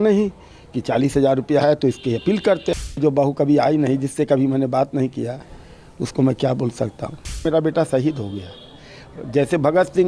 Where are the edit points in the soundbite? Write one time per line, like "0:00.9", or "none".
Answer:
0:02.9
0:07.4